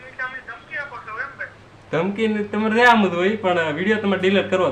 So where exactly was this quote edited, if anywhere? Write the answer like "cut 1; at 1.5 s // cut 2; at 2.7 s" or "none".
none